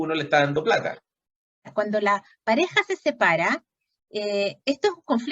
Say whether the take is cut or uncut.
cut